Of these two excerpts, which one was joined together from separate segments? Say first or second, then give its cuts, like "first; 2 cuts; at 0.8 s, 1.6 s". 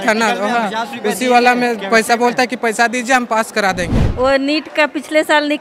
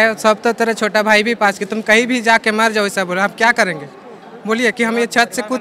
first; 1 cut; at 4.0 s